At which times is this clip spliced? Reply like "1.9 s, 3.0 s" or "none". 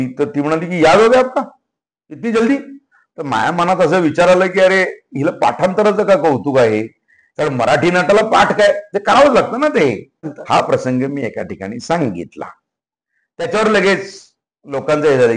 10.4 s